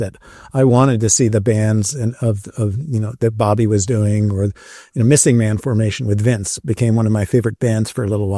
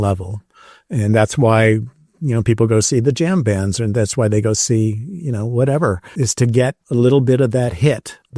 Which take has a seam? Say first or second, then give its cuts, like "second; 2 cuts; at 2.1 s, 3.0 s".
second; 1 cut; at 6.5 s